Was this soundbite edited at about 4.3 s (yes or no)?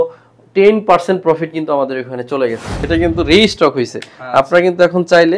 no